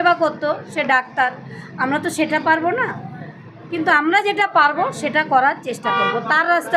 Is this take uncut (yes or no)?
yes